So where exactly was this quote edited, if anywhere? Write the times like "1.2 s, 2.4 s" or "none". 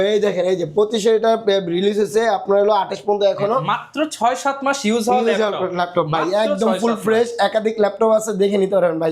none